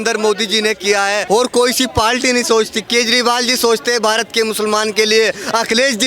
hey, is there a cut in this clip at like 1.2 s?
yes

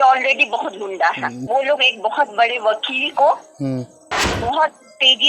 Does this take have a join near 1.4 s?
yes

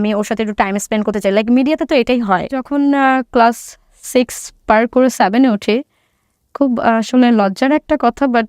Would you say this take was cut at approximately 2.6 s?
yes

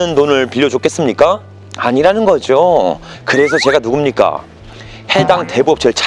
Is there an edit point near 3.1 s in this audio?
yes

